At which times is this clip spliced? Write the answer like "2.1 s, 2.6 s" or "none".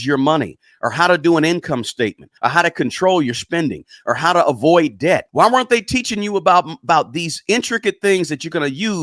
2.3 s, 5.3 s